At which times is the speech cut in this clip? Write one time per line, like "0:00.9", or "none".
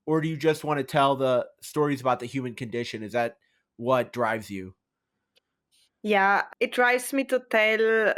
none